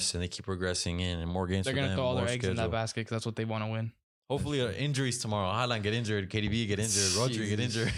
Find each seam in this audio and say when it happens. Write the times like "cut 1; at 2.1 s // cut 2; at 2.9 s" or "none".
none